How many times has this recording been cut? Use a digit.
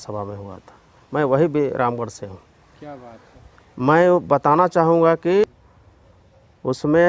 1